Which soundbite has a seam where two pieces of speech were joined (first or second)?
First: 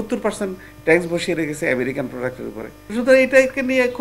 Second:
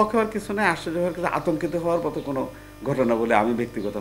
first